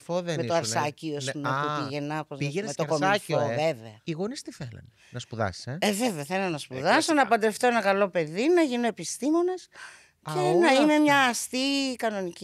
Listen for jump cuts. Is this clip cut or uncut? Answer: cut